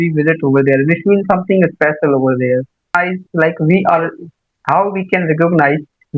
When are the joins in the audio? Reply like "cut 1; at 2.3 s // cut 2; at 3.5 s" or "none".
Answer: cut 1; at 2.9 s